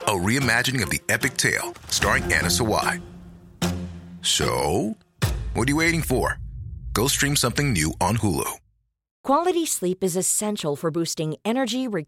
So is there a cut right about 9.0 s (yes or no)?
yes